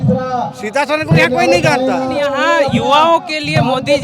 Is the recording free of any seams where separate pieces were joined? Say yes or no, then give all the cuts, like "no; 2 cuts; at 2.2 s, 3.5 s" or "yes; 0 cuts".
no; 1 cut; at 2.3 s